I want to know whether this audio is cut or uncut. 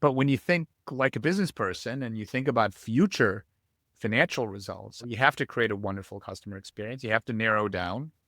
cut